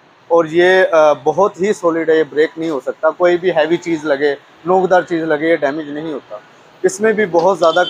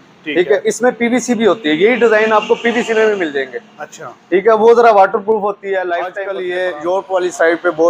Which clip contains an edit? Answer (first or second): second